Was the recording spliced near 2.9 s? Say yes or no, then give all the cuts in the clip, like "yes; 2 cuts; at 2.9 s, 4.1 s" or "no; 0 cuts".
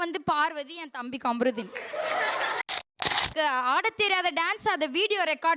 yes; 1 cut; at 2.9 s